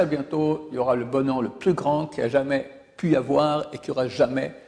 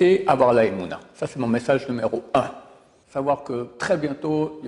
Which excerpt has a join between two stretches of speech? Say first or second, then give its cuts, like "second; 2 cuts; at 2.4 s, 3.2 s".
second; 1 cut; at 3.0 s